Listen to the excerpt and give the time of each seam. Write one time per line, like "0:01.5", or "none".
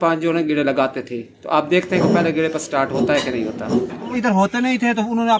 0:04.1